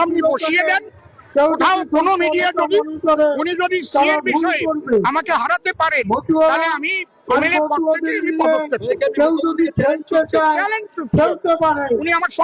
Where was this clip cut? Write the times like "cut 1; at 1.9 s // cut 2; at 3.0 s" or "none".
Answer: none